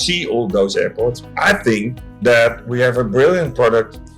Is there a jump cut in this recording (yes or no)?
yes